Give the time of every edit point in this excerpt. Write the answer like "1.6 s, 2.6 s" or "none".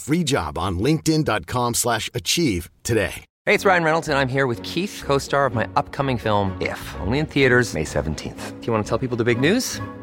3.3 s